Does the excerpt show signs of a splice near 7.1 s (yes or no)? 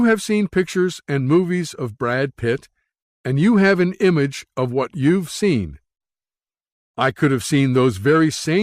no